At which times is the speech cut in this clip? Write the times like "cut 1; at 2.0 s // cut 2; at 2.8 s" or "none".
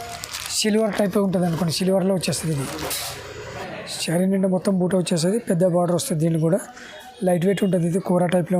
cut 1; at 3.6 s

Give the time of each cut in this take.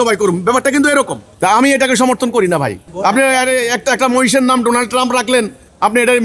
cut 1; at 1.2 s // cut 2; at 2.8 s

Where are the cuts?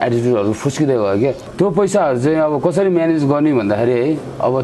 cut 1; at 1.4 s

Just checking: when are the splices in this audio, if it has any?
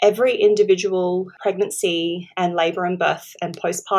cut 1; at 1.3 s

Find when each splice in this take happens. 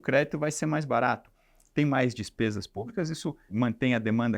cut 1; at 3.4 s

